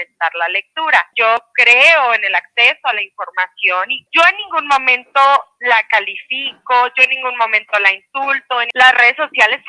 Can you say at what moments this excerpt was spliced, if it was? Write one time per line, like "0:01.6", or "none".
0:01.1
0:04.0
0:08.7